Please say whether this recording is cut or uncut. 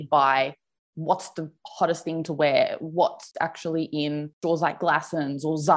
uncut